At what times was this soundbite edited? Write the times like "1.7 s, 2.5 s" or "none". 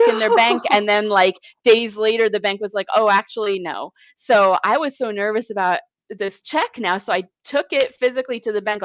none